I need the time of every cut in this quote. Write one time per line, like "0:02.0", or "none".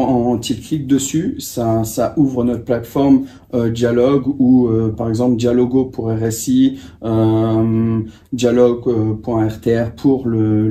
none